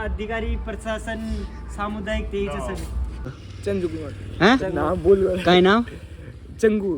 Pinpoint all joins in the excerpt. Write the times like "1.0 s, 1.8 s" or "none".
3.5 s